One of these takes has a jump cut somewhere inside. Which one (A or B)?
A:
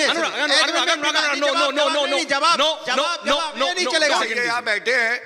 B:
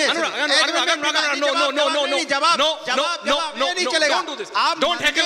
A